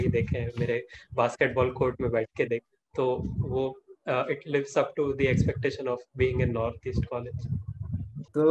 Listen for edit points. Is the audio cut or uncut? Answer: uncut